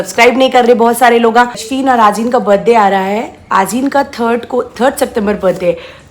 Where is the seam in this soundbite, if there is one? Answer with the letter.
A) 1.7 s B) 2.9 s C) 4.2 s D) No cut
A